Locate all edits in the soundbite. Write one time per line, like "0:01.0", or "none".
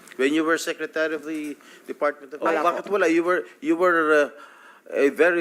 0:02.3